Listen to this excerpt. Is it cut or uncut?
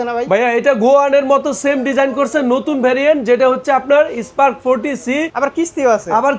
cut